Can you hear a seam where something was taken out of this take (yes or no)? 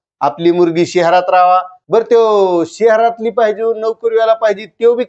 yes